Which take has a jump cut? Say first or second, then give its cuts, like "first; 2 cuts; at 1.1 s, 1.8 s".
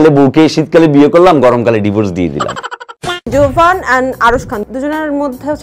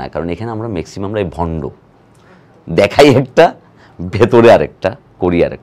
first; 2 cuts; at 3.3 s, 4.6 s